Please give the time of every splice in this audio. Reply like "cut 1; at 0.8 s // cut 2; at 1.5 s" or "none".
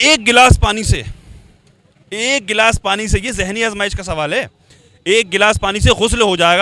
none